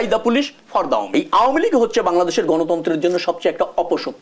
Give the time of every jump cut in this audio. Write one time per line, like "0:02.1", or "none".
0:01.1